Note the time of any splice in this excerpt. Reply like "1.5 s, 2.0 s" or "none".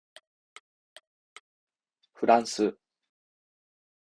1.6 s